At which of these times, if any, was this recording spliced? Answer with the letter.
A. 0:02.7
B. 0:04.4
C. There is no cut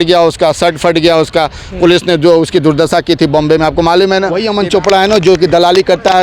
B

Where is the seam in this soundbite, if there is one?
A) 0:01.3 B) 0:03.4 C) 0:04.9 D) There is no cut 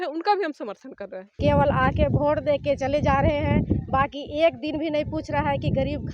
A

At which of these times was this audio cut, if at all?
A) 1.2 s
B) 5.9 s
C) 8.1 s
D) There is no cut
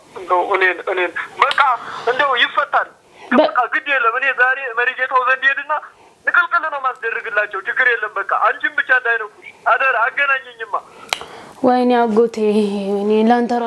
D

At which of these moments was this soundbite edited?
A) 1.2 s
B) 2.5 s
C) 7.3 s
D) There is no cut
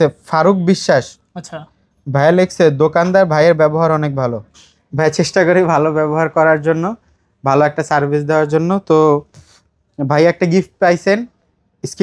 D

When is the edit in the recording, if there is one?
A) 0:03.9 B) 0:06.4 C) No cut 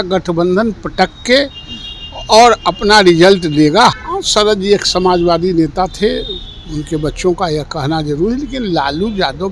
A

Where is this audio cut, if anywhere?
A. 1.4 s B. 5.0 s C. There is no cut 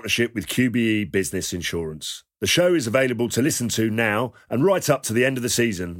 C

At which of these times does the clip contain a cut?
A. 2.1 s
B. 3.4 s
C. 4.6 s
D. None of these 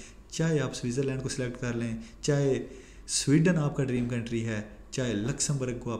D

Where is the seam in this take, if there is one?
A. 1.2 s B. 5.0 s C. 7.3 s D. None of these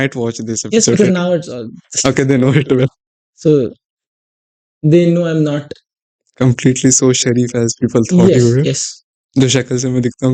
D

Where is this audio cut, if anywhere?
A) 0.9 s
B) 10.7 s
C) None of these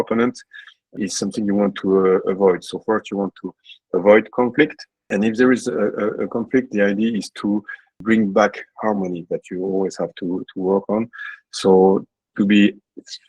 A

